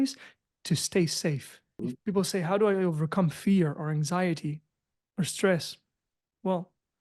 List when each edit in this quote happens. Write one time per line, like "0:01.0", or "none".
0:01.7